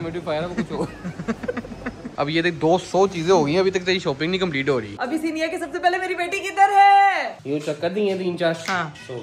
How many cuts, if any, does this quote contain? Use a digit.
3